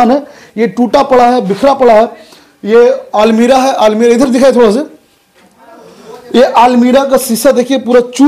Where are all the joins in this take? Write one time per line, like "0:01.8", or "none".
none